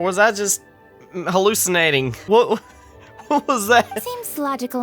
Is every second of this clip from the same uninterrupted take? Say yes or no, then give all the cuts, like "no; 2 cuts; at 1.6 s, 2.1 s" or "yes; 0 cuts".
no; 1 cut; at 2.2 s